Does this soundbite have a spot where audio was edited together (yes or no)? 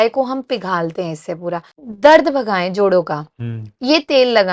yes